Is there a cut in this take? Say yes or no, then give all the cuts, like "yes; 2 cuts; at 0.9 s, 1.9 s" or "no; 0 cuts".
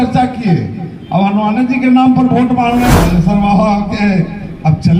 yes; 1 cut; at 3.0 s